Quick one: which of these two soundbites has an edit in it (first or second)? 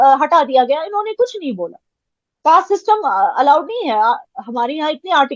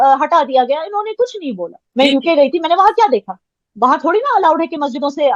second